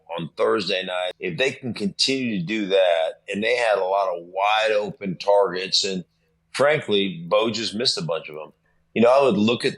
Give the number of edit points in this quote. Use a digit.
2